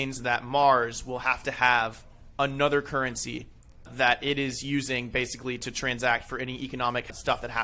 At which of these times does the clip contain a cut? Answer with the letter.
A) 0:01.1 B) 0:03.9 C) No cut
B